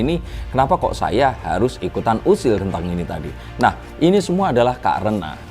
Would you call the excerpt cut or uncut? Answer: uncut